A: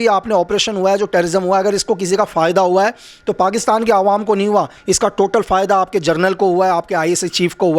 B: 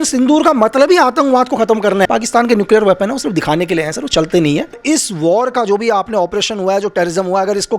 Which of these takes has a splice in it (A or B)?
B